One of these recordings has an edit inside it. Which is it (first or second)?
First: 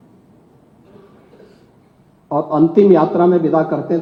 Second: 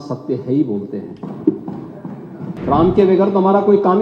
second